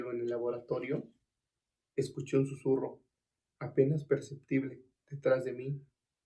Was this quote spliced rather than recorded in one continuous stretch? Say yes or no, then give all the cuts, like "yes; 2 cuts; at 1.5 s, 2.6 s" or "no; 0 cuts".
no; 0 cuts